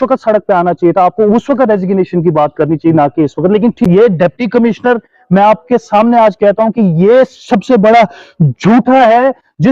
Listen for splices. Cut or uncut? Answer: cut